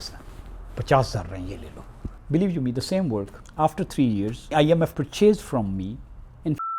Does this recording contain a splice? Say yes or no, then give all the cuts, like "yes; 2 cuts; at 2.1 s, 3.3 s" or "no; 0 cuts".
yes; 3 cuts; at 2.1 s, 3.4 s, 4.9 s